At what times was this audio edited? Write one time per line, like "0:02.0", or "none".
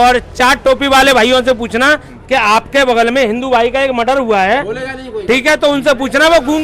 none